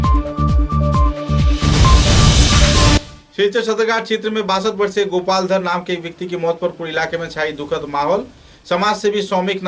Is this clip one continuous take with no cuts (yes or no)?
yes